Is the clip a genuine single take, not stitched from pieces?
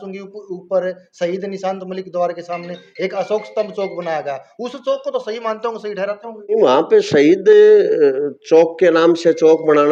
yes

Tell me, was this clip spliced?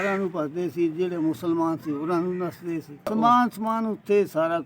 yes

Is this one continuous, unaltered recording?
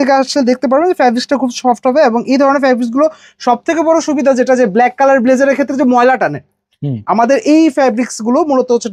yes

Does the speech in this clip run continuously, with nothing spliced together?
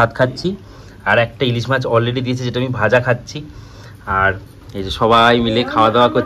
yes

